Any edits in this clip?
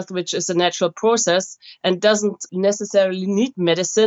yes; 1 cut; at 2.4 s

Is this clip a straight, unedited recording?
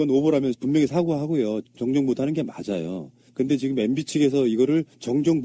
no; 1 cut; at 2.8 s

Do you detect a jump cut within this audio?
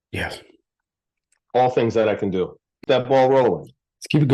yes; 1 cut; at 2.8 s

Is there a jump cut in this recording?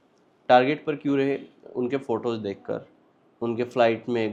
no; 0 cuts

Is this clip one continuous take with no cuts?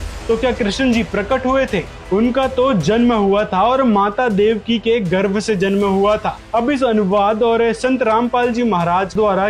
yes; 0 cuts

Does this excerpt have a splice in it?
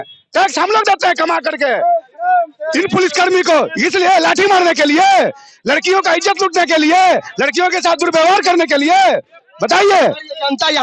no; 0 cuts

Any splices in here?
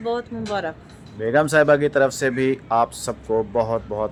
no; 0 cuts

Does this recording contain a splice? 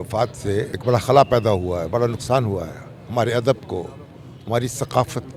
no; 0 cuts

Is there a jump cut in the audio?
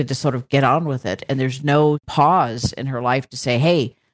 yes; 1 cut; at 2.0 s

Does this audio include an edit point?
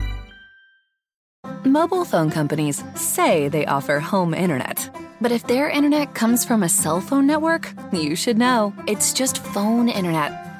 yes; 1 cut; at 1.2 s

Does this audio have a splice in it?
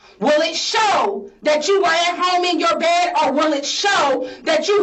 no; 0 cuts

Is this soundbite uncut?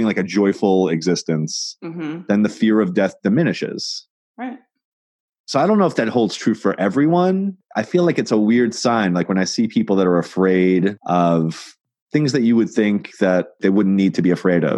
yes; 0 cuts

